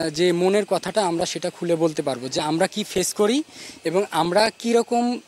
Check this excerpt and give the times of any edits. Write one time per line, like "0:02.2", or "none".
none